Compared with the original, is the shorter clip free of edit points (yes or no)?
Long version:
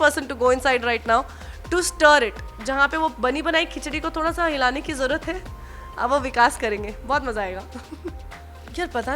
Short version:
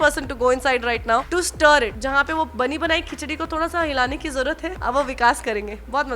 no